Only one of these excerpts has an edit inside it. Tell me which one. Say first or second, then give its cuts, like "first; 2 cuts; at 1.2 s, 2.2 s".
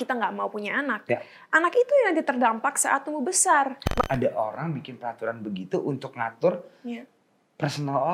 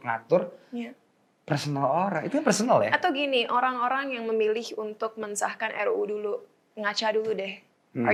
first; 1 cut; at 4.0 s